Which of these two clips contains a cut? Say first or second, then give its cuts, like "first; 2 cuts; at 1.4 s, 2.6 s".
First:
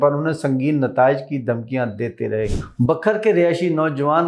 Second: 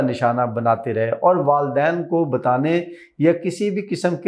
first; 1 cut; at 2.6 s